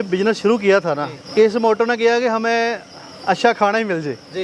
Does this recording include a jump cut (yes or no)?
yes